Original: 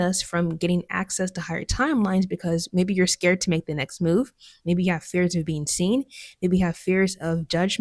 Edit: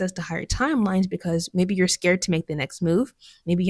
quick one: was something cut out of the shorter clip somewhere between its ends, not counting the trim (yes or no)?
no